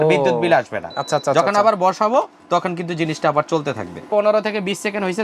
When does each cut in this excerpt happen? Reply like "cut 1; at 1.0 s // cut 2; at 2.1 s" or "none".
cut 1; at 4.1 s